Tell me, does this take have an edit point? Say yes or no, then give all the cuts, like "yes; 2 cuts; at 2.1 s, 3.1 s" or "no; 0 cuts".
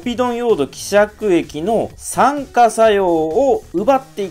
no; 0 cuts